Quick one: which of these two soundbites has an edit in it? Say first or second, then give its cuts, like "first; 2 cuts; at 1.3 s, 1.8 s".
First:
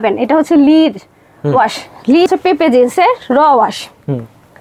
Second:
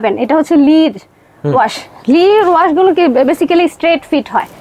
first; 1 cut; at 2.3 s